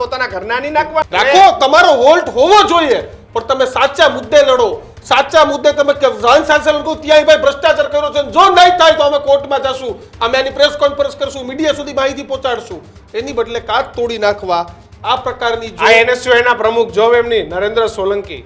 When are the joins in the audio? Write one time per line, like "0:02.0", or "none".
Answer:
none